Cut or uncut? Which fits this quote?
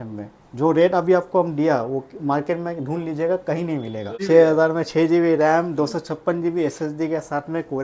cut